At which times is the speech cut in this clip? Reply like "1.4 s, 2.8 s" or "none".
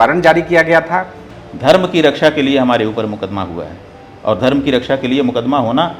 1.3 s

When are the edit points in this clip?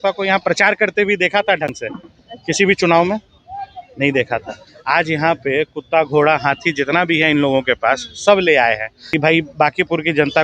8.9 s

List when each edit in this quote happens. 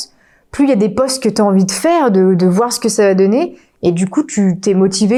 none

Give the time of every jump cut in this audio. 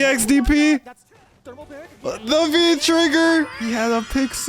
3.6 s

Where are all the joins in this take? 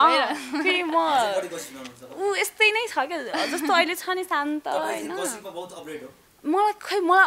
none

